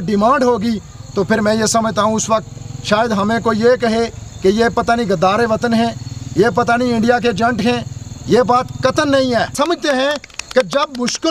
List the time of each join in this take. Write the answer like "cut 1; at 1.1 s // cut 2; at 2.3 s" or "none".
cut 1; at 9.5 s